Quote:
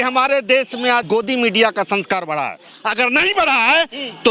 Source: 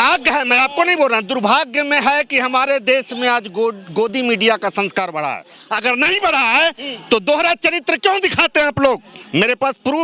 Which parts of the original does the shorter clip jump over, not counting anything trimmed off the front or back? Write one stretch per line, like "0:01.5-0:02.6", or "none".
0:03.4-0:03.9